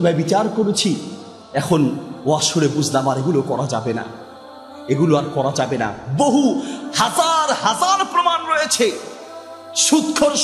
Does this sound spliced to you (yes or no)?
no